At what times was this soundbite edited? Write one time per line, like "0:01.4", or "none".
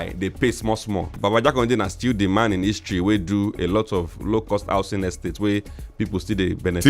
0:01.2